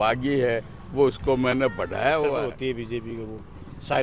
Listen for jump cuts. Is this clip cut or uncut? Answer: cut